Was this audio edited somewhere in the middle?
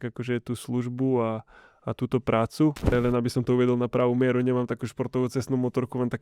yes; 1 cut; at 2.9 s

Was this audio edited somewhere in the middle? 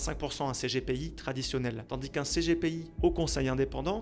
yes; 2 cuts; at 1.8 s, 2.9 s

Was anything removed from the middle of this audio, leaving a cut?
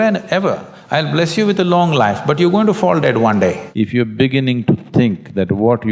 yes; 1 cut; at 3.6 s

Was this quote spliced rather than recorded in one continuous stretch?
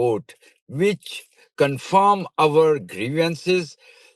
no; 0 cuts

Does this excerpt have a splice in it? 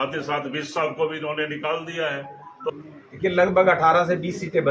yes; 1 cut; at 2.7 s

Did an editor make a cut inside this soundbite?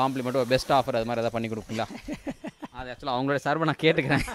no; 0 cuts

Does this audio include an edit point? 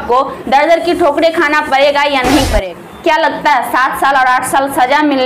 yes; 1 cut; at 2.6 s

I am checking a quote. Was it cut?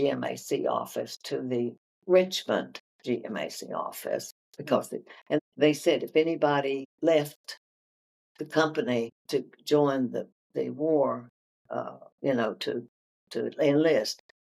yes; 3 cuts; at 5.4 s, 6.9 s, 9.2 s

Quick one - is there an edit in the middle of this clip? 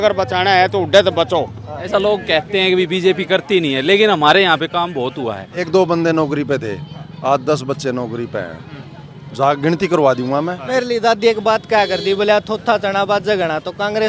yes; 3 cuts; at 1.9 s, 5.7 s, 10.6 s

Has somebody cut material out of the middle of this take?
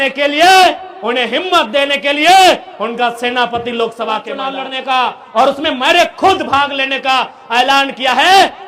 yes; 1 cut; at 4.4 s

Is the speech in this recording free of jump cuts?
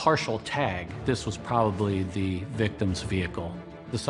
no; 1 cut; at 0.9 s

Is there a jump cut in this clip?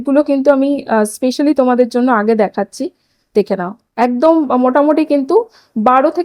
no; 0 cuts

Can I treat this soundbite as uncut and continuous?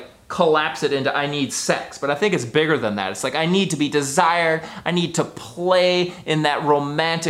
yes; 0 cuts

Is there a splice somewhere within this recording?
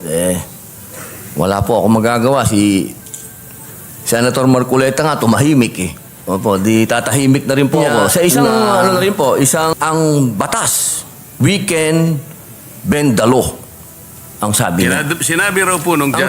yes; 2 cuts; at 9.7 s, 15.0 s

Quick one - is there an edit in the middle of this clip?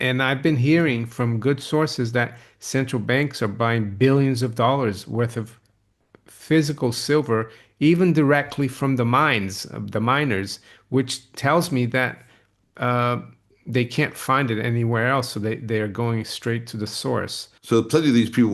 yes; 1 cut; at 17.4 s

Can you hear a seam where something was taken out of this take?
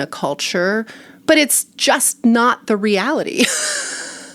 yes; 1 cut; at 1.1 s

